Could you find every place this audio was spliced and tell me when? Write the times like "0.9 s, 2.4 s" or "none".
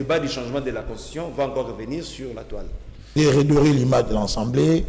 3.2 s